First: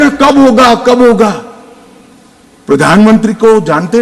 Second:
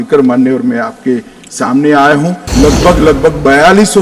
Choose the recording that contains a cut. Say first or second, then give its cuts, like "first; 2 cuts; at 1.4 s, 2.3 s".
second; 1 cut; at 2.4 s